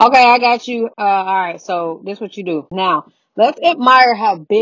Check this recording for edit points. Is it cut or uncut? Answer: cut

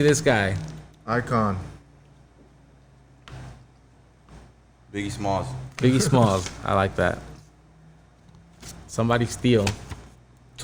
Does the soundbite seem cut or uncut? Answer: uncut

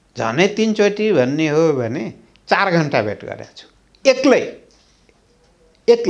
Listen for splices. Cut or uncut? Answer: uncut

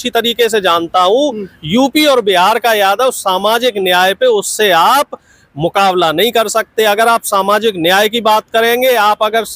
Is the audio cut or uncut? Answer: uncut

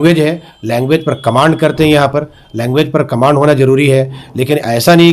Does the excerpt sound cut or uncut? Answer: uncut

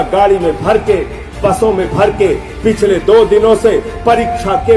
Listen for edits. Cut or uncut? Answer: uncut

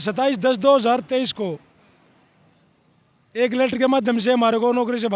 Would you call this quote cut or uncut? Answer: uncut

